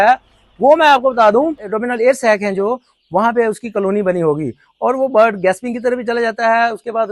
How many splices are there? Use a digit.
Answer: 1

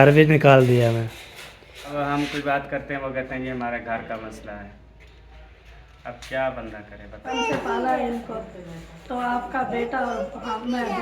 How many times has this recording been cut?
2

